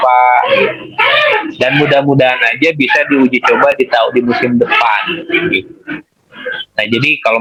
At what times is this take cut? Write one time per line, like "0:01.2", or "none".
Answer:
none